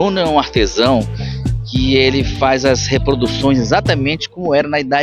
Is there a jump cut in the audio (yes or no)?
no